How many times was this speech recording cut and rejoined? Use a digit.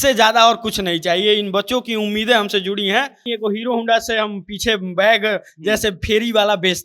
1